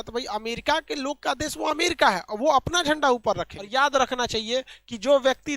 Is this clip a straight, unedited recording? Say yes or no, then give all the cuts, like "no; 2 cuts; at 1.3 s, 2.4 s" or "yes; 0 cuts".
no; 1 cut; at 3.5 s